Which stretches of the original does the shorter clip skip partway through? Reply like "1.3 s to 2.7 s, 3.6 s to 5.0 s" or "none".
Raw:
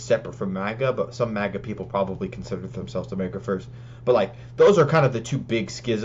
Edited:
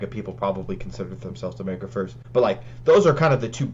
3.7 s to 3.9 s

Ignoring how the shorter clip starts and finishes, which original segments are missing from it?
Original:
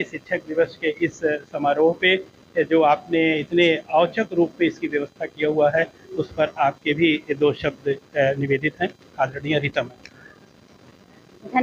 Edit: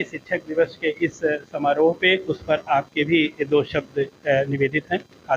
2.3 s to 6.2 s

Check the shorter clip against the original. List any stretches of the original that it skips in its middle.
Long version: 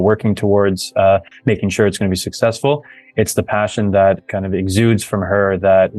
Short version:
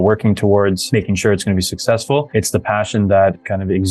0.8 s to 1.4 s, 2.8 s to 3.1 s

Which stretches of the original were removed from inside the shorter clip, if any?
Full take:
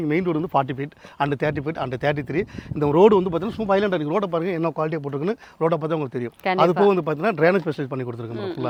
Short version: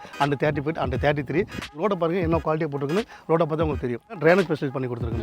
2.7 s to 4.0 s, 6.5 s to 7.3 s

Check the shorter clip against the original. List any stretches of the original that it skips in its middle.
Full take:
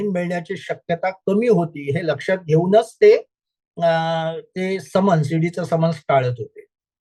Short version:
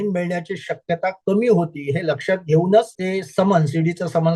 2.9 s to 4.5 s

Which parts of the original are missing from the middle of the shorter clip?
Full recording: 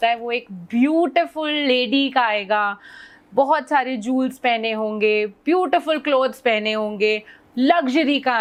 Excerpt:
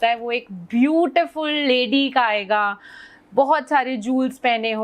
none

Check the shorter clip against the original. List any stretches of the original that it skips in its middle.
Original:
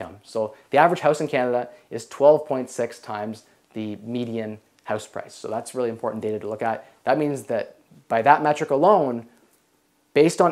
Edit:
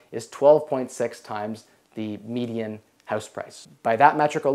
5.3 s to 7.8 s

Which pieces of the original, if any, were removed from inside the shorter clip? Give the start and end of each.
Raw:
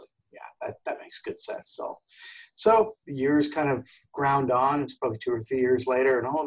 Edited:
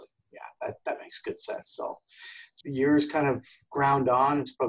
2.5 s to 3.0 s

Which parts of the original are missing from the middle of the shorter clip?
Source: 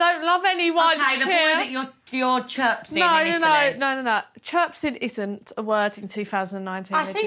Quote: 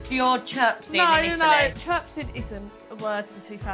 3.8 s to 4.4 s

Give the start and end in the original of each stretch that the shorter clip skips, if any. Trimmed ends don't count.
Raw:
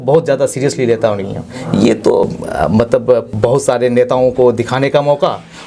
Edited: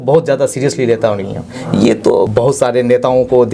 2.3 s to 3.4 s

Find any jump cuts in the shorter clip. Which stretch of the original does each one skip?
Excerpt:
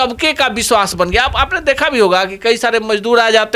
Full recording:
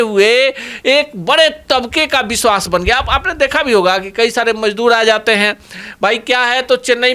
none

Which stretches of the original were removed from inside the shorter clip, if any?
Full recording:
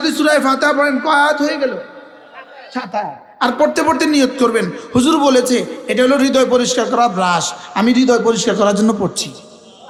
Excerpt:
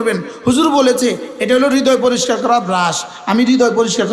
none

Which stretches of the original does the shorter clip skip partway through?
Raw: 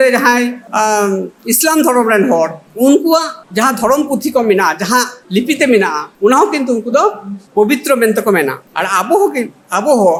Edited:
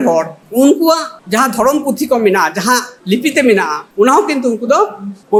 none

